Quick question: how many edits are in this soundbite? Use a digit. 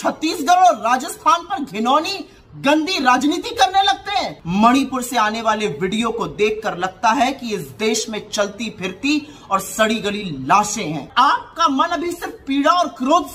2